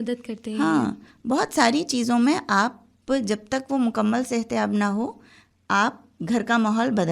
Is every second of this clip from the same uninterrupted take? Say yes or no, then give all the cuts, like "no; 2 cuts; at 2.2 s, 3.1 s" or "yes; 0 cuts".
yes; 0 cuts